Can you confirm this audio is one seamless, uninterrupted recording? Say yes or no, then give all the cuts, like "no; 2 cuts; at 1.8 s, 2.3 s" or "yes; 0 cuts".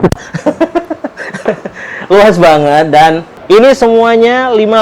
no; 1 cut; at 3.3 s